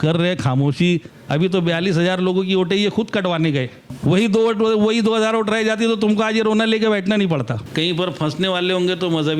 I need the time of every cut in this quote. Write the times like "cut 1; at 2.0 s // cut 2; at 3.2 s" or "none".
cut 1; at 1.2 s // cut 2; at 3.9 s // cut 3; at 7.6 s